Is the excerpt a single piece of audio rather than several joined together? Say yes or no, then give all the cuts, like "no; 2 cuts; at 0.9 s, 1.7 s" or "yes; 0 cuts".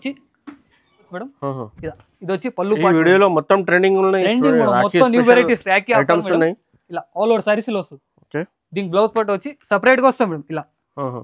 no; 1 cut; at 1.1 s